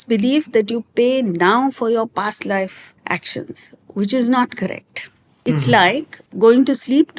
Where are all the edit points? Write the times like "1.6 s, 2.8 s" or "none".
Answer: 2.9 s, 5.3 s, 6.2 s